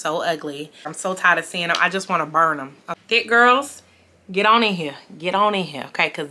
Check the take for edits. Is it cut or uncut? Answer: cut